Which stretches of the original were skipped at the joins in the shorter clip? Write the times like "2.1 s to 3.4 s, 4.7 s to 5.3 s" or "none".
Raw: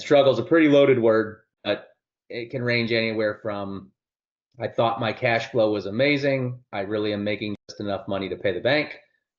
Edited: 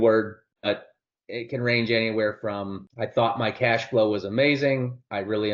3.8 s to 4.4 s